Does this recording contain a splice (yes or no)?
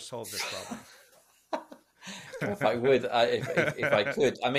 no